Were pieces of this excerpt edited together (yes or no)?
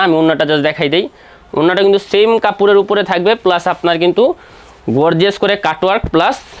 no